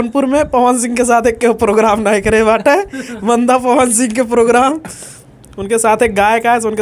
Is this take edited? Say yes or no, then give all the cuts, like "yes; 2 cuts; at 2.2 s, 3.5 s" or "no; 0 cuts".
no; 0 cuts